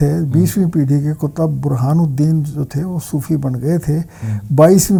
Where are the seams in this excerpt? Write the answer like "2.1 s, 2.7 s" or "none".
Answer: none